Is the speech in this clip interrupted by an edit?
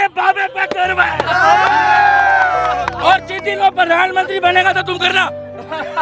no; 0 cuts

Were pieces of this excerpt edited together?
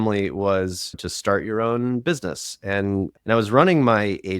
yes; 2 cuts; at 0.9 s, 3.1 s

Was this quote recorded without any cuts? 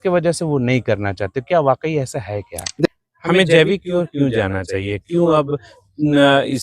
no; 1 cut; at 2.7 s

